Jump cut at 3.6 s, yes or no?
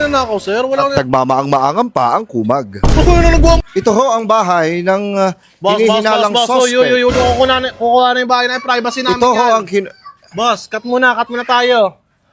yes